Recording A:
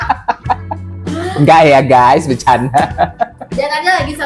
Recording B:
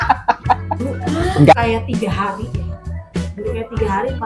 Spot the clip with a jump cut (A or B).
B